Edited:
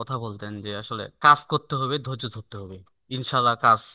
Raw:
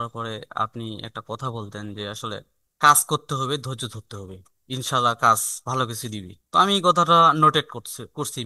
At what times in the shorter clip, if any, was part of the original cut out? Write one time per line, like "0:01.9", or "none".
0:01.1